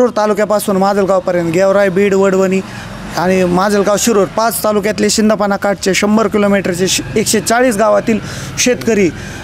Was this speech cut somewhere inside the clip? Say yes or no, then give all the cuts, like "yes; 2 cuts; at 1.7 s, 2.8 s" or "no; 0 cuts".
no; 0 cuts